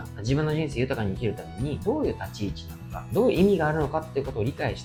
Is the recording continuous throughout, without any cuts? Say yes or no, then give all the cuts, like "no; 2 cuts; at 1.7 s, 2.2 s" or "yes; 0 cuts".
yes; 0 cuts